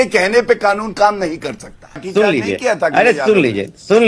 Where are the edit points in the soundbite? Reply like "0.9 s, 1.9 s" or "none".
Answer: 2.1 s